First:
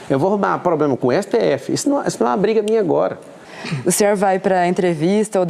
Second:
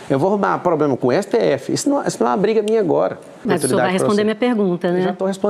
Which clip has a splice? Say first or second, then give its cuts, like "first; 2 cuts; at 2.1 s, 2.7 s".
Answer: second; 1 cut; at 3.4 s